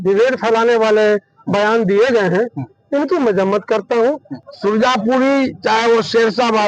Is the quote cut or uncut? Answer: cut